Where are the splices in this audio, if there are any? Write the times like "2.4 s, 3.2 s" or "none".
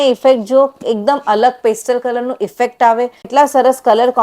3.3 s